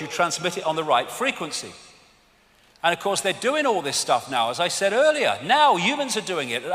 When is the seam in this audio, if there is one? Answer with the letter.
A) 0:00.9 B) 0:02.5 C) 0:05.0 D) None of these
B